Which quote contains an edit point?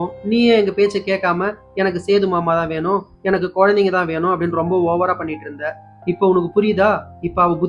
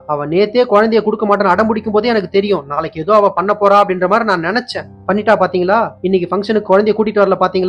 second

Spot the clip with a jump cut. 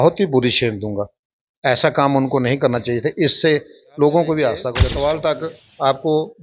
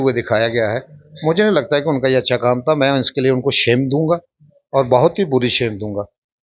first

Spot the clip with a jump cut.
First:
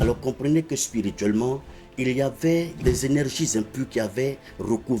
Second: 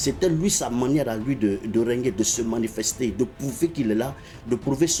first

